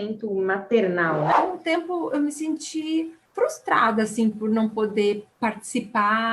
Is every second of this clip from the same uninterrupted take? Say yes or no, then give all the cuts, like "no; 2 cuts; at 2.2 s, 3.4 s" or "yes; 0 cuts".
no; 3 cuts; at 1.3 s, 3.2 s, 5.3 s